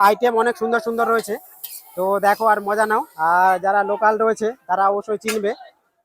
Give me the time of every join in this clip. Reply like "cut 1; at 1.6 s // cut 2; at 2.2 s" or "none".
none